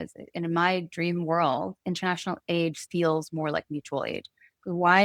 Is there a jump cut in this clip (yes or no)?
no